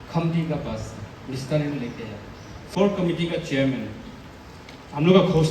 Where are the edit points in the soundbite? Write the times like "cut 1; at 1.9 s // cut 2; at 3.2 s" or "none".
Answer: cut 1; at 2.7 s